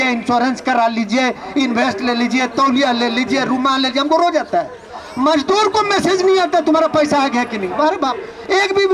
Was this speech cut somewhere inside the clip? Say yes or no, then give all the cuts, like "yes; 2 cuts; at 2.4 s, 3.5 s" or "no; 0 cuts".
no; 0 cuts